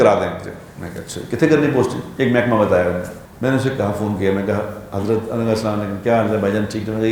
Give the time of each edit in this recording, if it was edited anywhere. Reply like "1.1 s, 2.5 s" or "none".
3.2 s